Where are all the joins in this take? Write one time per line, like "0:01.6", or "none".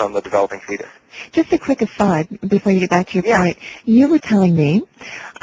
0:01.1